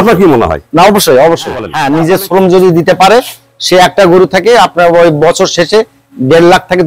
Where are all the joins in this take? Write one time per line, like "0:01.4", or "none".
0:01.7